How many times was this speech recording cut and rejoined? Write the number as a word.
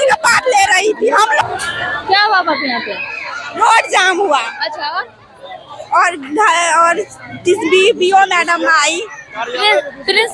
one